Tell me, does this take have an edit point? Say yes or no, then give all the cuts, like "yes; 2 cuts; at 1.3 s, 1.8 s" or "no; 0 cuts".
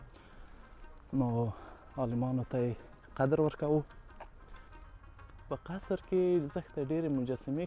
yes; 1 cut; at 4.7 s